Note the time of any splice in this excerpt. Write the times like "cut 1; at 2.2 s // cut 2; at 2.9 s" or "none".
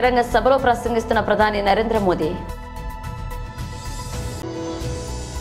cut 1; at 2.5 s // cut 2; at 4.0 s